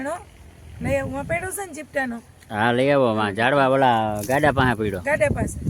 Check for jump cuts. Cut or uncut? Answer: uncut